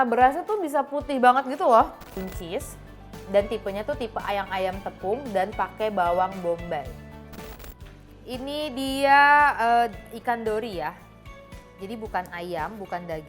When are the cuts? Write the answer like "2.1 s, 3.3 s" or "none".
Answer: 2.3 s, 7.6 s